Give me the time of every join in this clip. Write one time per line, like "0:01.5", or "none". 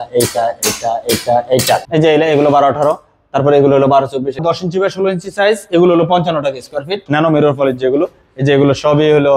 0:01.9
0:04.3
0:07.1